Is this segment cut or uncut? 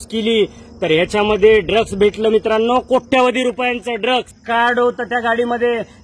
cut